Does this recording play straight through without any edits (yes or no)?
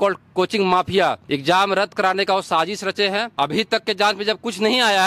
no